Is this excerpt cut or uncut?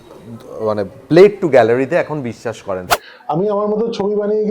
cut